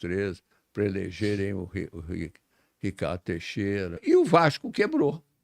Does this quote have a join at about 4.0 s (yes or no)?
yes